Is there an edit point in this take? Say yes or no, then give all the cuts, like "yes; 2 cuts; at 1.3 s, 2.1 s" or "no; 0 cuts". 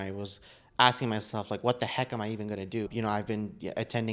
yes; 1 cut; at 2.9 s